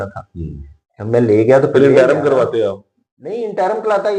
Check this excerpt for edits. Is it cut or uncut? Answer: uncut